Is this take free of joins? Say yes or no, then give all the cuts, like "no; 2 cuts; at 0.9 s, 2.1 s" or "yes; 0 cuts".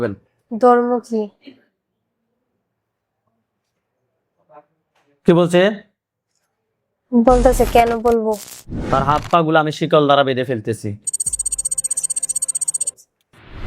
no; 1 cut; at 8.8 s